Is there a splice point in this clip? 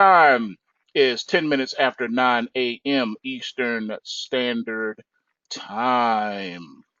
yes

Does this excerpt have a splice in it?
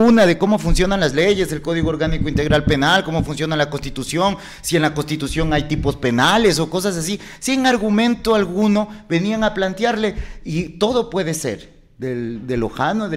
no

